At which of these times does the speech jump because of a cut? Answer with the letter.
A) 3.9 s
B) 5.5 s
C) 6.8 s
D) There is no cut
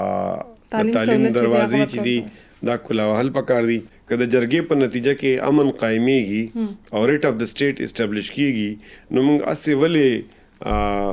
A